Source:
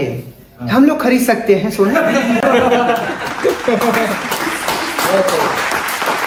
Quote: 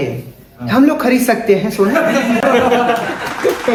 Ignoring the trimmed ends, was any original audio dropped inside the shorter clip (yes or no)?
no